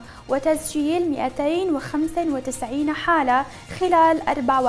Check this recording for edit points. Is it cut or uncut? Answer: uncut